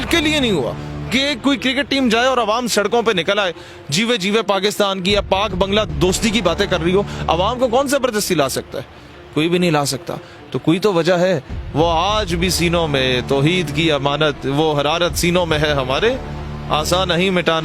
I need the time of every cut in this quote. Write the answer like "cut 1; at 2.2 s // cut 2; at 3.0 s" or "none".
cut 1; at 7.2 s